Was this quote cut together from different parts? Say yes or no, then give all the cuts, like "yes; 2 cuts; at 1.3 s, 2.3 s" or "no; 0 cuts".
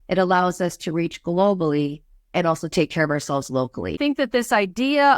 yes; 2 cuts; at 2.3 s, 4.0 s